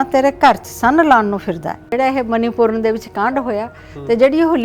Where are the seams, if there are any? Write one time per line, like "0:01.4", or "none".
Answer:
0:01.9